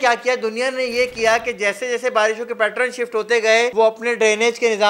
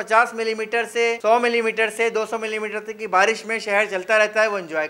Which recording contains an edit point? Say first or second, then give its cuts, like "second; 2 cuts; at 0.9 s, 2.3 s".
first; 1 cut; at 3.7 s